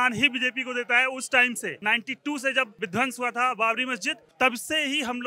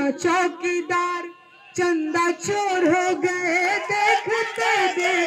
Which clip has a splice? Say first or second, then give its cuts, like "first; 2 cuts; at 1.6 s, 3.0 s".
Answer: first; 3 cuts; at 1.8 s, 2.7 s, 4.2 s